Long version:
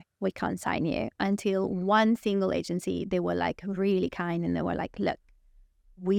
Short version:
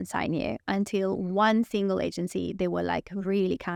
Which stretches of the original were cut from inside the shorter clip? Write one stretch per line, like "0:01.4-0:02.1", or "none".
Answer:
none